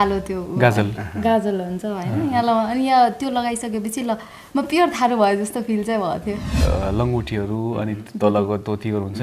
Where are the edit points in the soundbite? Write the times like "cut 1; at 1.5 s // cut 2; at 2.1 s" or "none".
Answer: cut 1; at 6.6 s

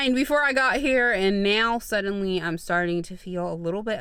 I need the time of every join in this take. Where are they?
none

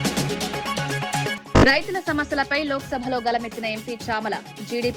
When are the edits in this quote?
cut 1; at 1.4 s

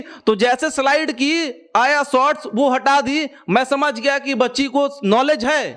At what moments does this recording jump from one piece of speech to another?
none

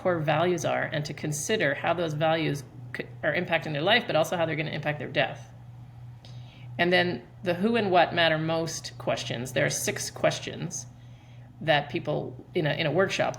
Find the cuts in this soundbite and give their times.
none

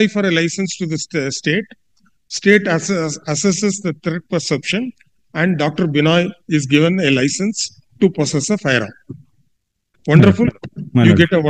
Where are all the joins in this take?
none

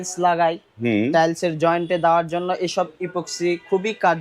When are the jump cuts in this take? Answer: none

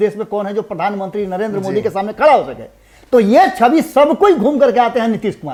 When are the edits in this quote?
none

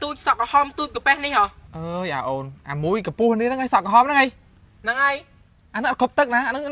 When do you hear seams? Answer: cut 1; at 1.7 s

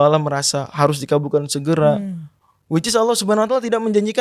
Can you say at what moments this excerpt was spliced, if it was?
none

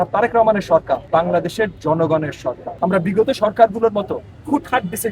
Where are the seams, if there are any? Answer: cut 1; at 1.0 s // cut 2; at 2.7 s

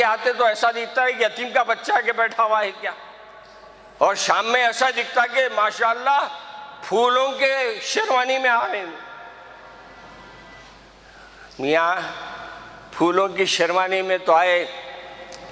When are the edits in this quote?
none

